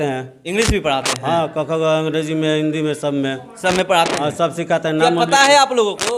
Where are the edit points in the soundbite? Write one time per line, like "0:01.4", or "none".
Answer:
none